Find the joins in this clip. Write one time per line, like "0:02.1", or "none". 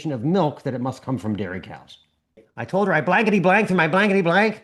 0:02.5